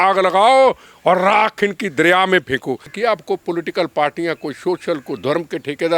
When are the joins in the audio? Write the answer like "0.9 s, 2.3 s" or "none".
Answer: 2.9 s